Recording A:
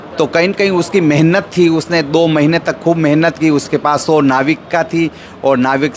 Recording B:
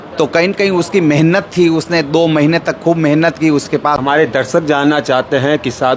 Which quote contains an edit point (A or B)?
B